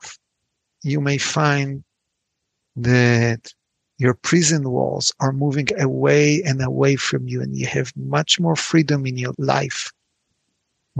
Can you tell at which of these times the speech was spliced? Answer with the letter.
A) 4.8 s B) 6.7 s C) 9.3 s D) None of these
C